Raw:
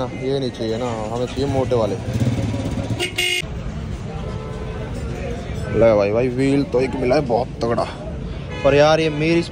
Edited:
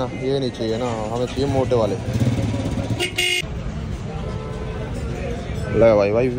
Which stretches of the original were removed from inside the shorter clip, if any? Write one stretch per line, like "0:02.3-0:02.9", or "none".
none